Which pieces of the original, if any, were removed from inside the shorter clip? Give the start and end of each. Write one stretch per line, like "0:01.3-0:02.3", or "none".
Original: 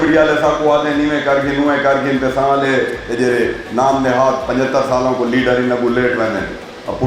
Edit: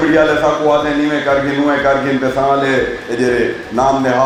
none